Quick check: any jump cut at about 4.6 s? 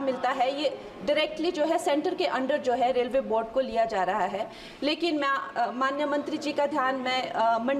yes; 1 cut; at 4.6 s

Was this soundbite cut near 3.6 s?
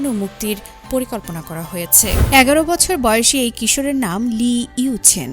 no; 1 cut; at 2.2 s

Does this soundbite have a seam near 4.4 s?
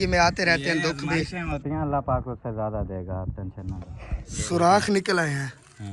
yes; 1 cut; at 4.4 s

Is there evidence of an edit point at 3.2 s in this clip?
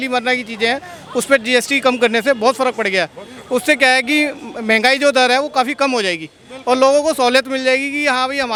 no; 0 cuts

